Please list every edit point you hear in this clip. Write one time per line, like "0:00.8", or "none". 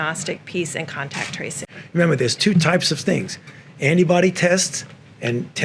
0:01.7